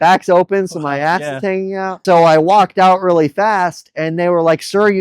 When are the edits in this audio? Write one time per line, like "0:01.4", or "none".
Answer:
0:02.0